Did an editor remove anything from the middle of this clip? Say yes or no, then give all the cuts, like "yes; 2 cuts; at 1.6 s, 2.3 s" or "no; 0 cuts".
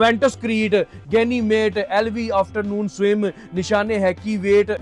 no; 0 cuts